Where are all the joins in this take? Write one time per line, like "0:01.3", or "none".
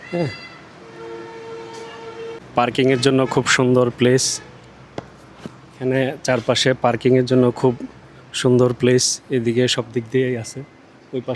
0:02.4